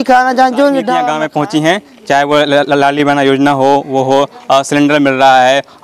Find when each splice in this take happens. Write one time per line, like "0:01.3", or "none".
0:01.0